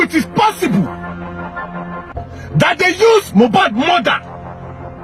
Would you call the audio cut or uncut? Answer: uncut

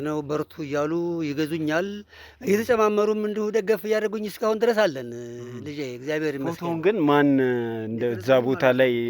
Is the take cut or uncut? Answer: uncut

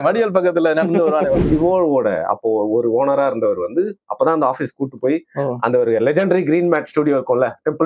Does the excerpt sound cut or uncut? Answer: cut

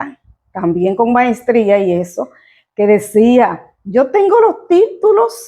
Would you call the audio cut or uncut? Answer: uncut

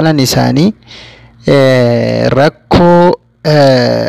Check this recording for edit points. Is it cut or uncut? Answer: uncut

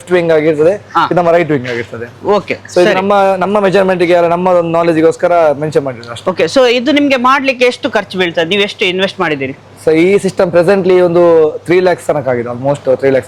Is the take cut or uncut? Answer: uncut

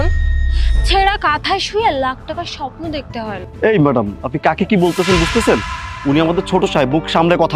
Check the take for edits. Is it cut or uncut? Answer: cut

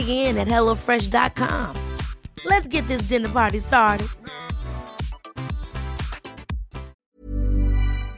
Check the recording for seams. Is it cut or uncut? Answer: cut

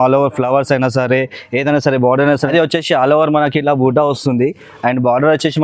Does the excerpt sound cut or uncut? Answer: cut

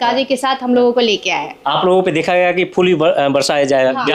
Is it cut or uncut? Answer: uncut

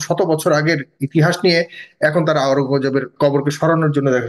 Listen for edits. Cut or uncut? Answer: cut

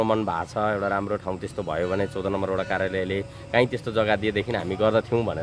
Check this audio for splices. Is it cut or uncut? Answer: uncut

